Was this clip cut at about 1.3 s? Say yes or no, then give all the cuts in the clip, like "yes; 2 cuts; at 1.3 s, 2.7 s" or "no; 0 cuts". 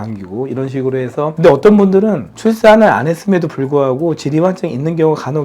yes; 1 cut; at 1.3 s